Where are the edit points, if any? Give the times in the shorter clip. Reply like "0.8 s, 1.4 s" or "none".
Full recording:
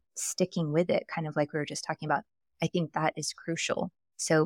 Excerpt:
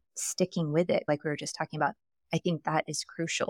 1.0 s